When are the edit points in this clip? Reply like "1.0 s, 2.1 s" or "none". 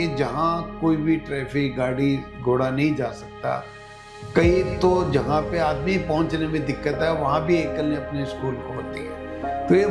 none